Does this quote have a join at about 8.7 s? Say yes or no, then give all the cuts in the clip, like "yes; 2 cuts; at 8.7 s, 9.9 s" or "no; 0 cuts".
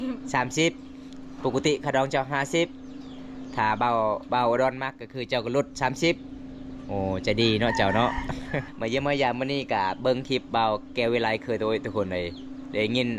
yes; 1 cut; at 8.7 s